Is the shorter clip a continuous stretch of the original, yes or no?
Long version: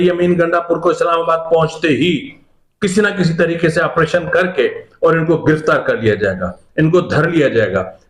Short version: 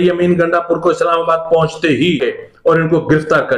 no